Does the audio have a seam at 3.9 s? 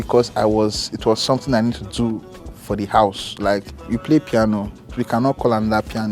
yes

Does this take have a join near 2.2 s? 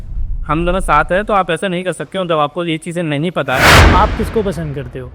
no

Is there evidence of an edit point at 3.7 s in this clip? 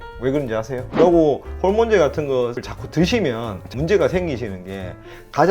yes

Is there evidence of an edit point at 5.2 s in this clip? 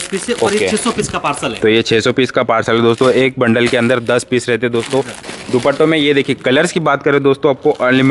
yes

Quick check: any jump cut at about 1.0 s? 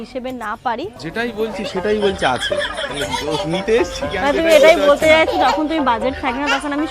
yes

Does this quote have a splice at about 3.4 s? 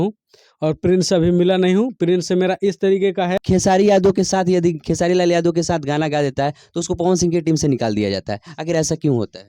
yes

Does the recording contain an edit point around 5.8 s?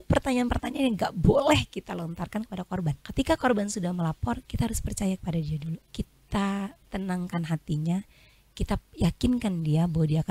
yes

